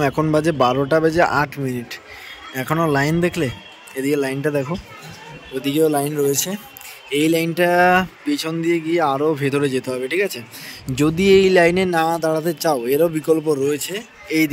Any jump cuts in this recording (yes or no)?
no